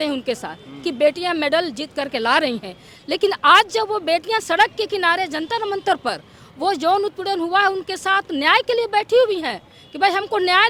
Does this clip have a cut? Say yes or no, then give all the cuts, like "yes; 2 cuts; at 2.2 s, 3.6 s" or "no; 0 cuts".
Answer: no; 0 cuts